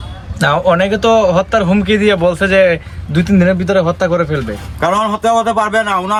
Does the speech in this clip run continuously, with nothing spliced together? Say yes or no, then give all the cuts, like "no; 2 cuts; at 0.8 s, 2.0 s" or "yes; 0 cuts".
yes; 0 cuts